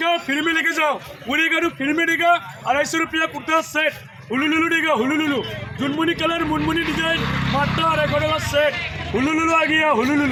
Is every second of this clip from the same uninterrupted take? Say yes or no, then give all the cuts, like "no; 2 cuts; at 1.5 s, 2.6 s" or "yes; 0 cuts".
yes; 0 cuts